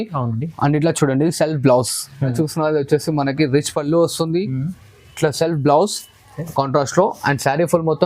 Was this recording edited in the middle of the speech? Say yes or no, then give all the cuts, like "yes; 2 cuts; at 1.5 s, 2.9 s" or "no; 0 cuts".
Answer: yes; 1 cut; at 2.3 s